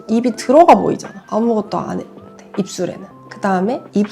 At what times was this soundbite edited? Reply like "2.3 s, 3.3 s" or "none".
3.1 s